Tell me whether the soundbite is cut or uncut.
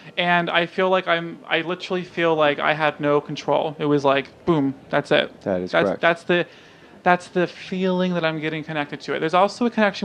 cut